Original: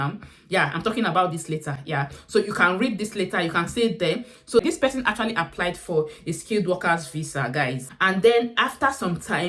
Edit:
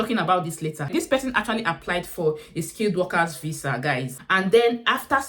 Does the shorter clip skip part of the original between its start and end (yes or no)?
yes